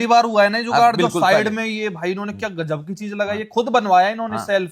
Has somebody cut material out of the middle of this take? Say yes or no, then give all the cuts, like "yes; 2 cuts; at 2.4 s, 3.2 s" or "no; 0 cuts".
no; 0 cuts